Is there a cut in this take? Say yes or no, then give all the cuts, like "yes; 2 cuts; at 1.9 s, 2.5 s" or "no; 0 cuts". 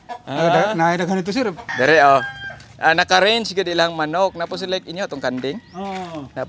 yes; 1 cut; at 1.6 s